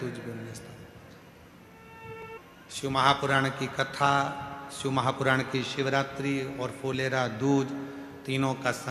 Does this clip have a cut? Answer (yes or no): yes